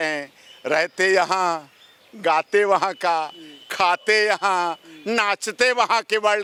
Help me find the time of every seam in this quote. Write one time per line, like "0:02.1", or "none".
none

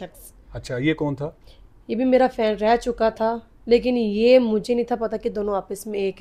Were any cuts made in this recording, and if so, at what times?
none

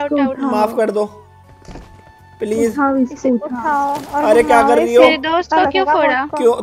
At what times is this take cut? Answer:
none

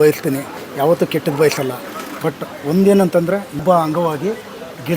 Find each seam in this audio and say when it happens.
0:03.6

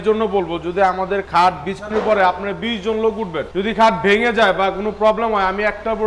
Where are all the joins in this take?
none

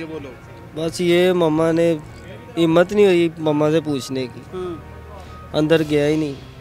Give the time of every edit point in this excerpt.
none

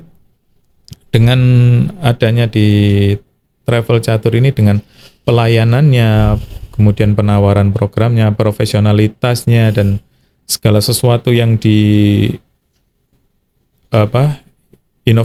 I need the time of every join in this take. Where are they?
none

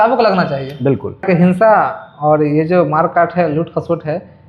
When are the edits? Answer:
0:01.2

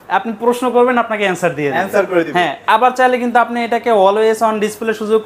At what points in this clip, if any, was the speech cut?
none

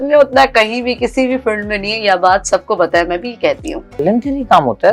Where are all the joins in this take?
0:04.0

